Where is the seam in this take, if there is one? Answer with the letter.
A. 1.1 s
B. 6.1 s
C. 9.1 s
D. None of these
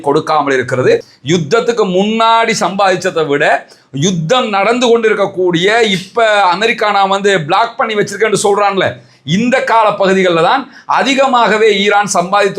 A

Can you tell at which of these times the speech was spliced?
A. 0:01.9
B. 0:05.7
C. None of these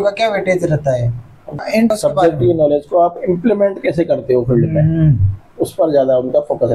A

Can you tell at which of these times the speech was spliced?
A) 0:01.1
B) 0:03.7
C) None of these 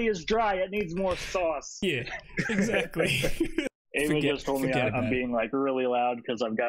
B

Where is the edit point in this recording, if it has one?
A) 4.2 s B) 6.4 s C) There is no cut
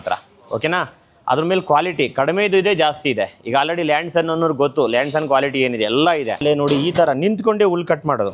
B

